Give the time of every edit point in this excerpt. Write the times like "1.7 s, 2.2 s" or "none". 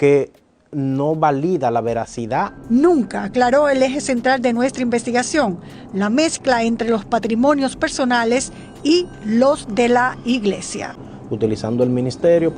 2.6 s, 11.0 s